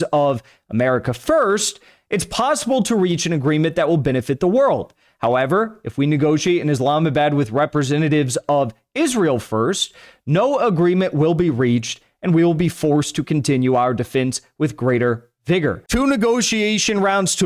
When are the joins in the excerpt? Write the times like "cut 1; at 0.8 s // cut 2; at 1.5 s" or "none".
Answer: cut 1; at 15.8 s

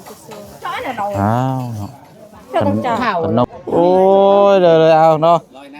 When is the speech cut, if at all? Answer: cut 1; at 3.4 s

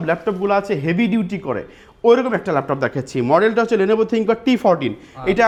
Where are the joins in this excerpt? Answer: none

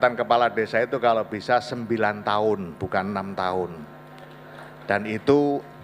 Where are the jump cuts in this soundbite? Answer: cut 1; at 2.7 s

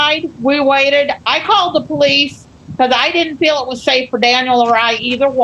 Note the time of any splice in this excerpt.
none

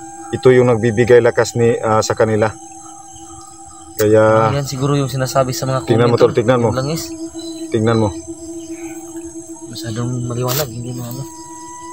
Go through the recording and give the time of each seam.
cut 1; at 8.3 s // cut 2; at 9.7 s

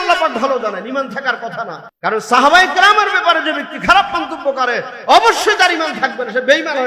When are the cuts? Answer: cut 1; at 1.8 s

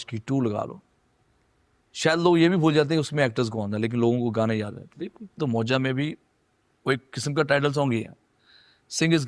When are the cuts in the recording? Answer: cut 1; at 5.2 s

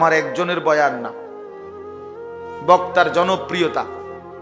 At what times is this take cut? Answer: cut 1; at 1.0 s // cut 2; at 2.6 s

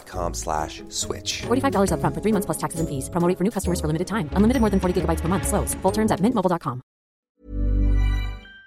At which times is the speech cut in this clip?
cut 1; at 7.3 s

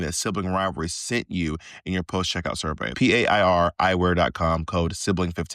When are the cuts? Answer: cut 1; at 2.9 s

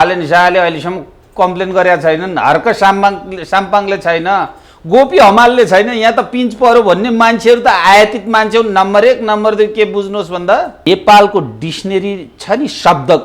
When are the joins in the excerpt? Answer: cut 1; at 10.8 s

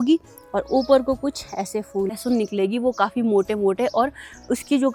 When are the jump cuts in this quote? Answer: none

